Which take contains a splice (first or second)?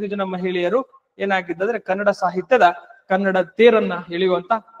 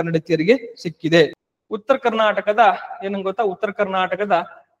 second